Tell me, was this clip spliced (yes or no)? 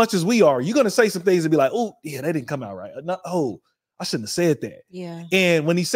no